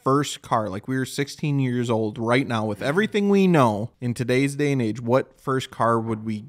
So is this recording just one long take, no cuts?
no; 1 cut; at 4.0 s

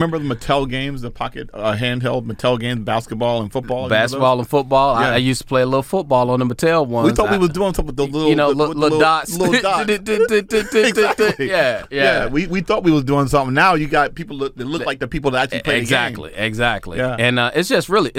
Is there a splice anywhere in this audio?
no; 0 cuts

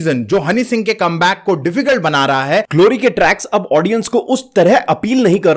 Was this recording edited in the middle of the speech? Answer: yes; 1 cut; at 2.7 s

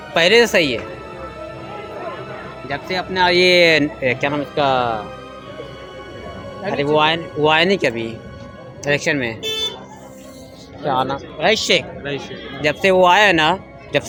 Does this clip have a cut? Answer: no; 0 cuts

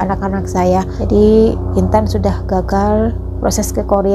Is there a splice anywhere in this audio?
yes; 1 cut; at 1.0 s

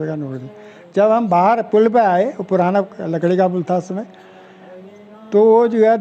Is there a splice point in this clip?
no; 0 cuts

